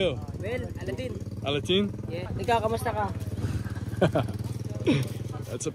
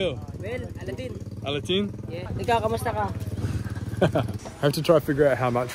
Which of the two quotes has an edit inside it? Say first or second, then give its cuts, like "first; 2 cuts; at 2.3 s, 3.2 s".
second; 1 cut; at 4.4 s